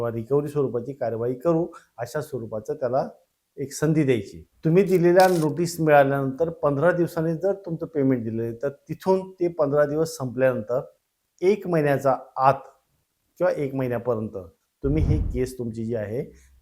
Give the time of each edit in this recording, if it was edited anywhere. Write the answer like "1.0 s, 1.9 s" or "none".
4.4 s